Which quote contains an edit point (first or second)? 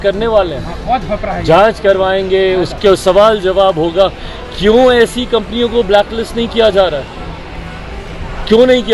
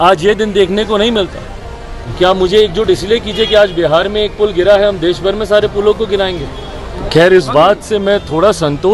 second